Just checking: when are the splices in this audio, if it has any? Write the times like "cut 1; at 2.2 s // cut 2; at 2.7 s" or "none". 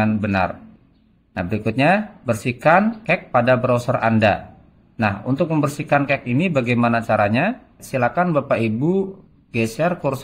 cut 1; at 7.8 s